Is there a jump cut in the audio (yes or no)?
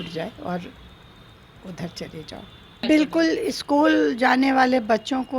yes